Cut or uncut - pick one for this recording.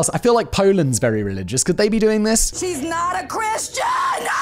cut